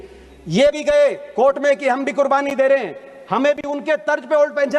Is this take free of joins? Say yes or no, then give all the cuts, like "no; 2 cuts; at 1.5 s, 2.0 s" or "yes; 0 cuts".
yes; 0 cuts